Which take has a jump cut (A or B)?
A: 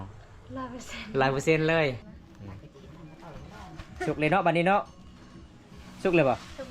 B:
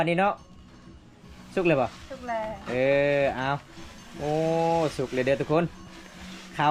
A